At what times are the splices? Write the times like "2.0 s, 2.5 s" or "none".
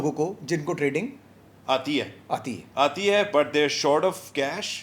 none